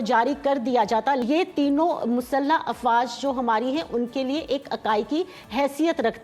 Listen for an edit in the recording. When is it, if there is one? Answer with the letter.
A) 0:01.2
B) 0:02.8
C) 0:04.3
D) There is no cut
A